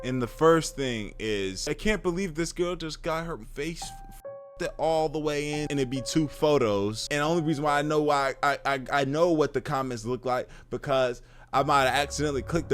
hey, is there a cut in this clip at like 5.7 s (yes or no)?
yes